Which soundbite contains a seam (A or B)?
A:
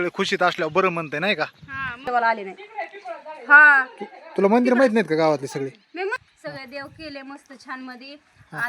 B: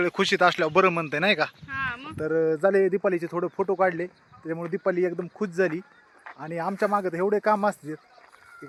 A